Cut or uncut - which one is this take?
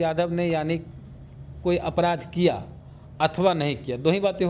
uncut